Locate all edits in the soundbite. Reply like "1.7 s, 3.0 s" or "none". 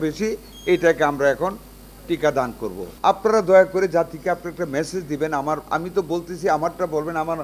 2.9 s

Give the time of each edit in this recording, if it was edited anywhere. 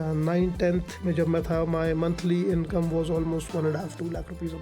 0.9 s

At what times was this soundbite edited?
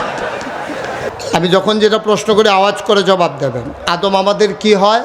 1.1 s

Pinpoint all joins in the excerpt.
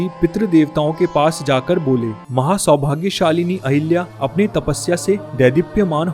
2.2 s

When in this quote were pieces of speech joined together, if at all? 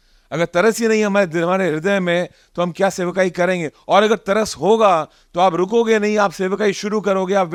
none

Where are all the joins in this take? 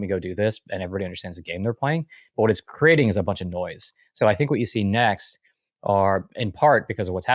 none

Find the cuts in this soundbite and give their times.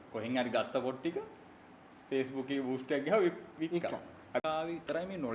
4.4 s

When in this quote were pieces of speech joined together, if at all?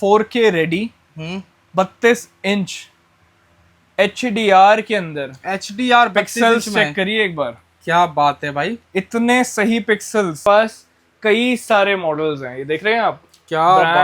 10.4 s

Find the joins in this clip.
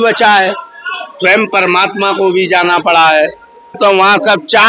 3.8 s

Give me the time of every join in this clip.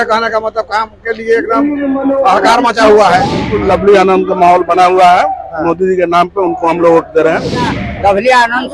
3.4 s, 7.8 s

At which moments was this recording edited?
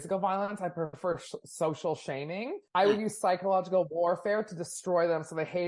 2.5 s

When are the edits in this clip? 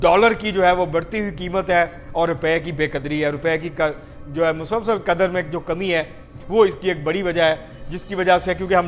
none

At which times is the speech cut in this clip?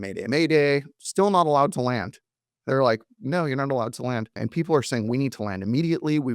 4.4 s

